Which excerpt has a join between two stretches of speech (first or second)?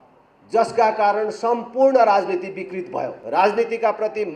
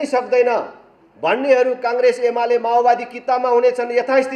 first